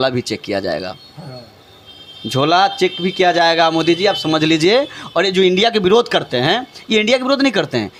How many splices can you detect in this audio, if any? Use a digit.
0